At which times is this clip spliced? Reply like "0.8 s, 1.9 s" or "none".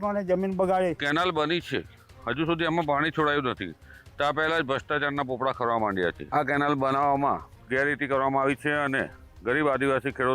1.0 s, 6.2 s